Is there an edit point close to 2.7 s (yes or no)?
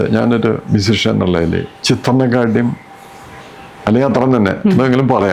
no